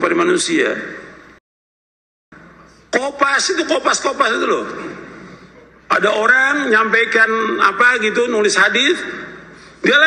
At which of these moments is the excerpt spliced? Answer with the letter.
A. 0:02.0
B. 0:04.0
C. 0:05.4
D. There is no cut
A